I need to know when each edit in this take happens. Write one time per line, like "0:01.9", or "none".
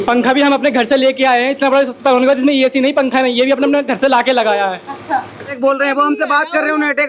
0:05.6